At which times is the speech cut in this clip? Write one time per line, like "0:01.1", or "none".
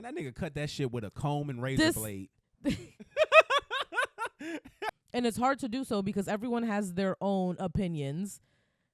0:04.9